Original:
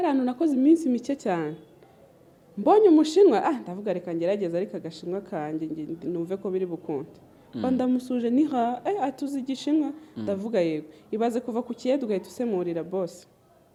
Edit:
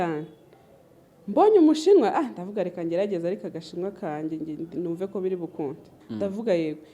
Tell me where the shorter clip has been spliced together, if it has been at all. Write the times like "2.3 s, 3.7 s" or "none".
6.0 s